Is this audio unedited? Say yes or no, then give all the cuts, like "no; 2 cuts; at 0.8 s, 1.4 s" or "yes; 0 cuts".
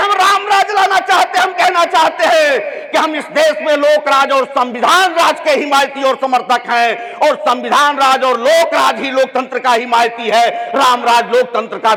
yes; 0 cuts